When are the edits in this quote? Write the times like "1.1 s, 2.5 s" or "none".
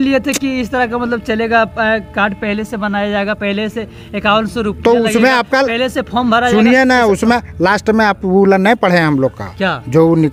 none